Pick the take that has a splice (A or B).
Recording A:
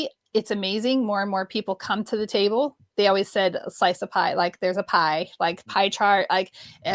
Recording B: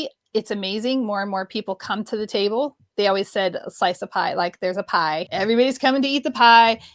B